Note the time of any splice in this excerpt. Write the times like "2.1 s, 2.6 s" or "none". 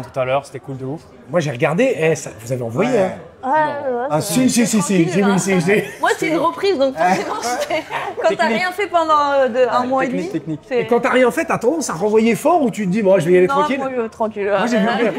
none